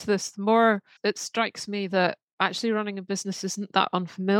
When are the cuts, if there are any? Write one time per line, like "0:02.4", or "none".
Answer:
0:00.9